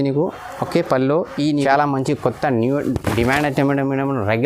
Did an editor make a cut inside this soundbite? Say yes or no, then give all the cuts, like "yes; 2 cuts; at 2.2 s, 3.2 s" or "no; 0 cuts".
yes; 1 cut; at 1.5 s